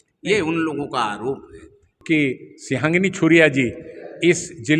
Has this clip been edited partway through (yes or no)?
yes